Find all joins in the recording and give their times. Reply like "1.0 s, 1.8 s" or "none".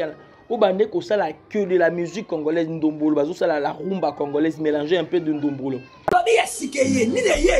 5.9 s